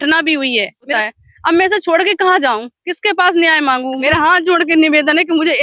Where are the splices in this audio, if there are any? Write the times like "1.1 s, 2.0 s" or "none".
0.9 s, 4.0 s